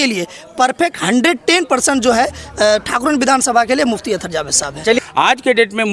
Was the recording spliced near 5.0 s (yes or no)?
yes